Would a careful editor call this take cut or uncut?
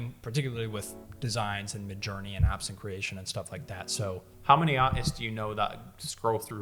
cut